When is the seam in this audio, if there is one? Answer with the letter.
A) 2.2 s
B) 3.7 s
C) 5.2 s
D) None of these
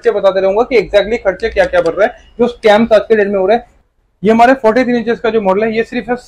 B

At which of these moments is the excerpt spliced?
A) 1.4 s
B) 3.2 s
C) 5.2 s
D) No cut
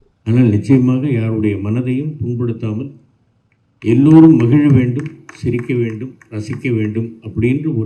D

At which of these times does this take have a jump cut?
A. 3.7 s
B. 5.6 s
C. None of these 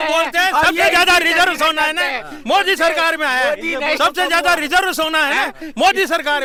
C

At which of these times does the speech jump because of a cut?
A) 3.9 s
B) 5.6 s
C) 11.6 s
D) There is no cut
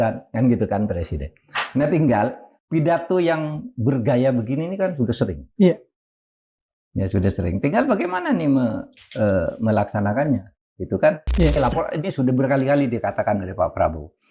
C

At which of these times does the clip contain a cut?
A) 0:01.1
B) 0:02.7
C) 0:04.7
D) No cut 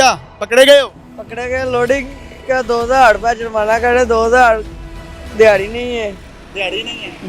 D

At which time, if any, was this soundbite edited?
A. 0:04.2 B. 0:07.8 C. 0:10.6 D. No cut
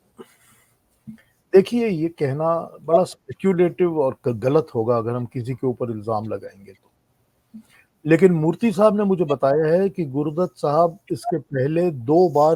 D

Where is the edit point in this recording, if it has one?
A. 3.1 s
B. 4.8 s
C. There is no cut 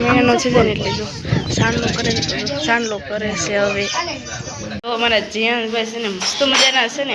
B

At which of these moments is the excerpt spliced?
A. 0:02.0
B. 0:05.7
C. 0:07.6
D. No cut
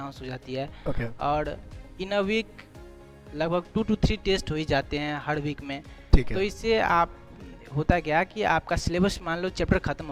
D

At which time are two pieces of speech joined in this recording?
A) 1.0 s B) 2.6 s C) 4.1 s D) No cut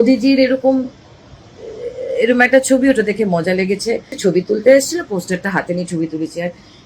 C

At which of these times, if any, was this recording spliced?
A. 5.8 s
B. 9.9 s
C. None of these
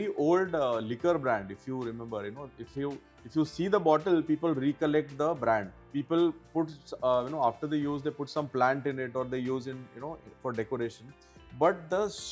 A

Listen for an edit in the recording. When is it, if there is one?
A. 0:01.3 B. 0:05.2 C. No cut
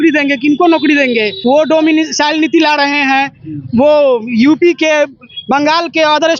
A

